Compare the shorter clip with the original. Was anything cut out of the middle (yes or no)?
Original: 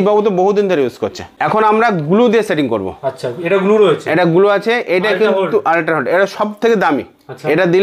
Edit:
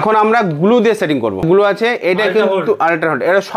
yes